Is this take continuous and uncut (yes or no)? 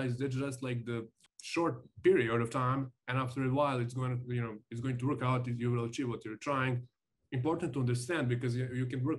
yes